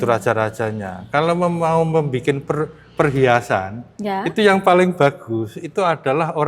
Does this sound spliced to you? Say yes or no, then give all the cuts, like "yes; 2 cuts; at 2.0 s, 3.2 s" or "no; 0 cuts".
no; 0 cuts